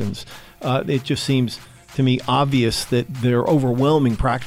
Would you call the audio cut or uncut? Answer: cut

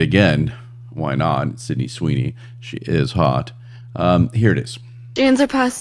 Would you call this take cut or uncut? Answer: uncut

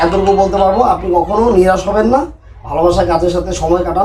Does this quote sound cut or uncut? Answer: uncut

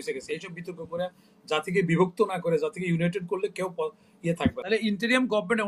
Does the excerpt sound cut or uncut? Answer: cut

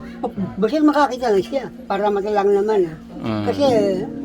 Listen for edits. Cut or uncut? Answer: cut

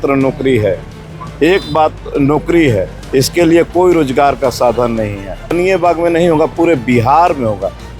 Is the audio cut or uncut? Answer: cut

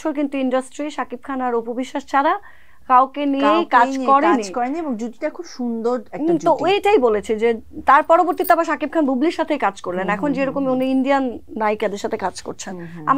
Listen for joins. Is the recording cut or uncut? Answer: uncut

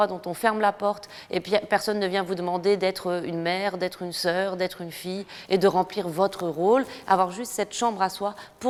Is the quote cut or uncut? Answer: uncut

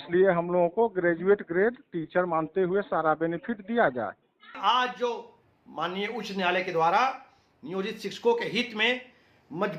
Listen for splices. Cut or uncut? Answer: cut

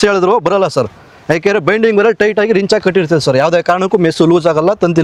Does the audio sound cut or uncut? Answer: uncut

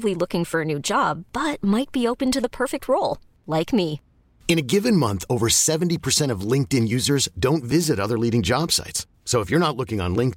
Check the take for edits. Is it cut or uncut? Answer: uncut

